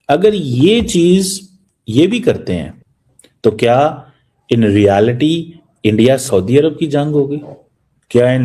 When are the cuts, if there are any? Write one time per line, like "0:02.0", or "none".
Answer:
0:02.7